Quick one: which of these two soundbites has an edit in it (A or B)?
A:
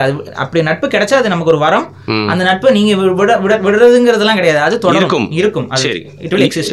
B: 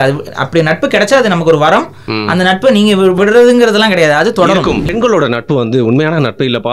B